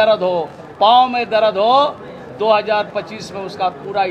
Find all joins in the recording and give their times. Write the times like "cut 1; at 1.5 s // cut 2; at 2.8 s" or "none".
none